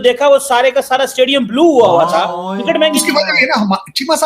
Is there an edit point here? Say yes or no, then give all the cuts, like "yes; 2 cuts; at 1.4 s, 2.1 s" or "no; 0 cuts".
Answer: yes; 1 cut; at 2.5 s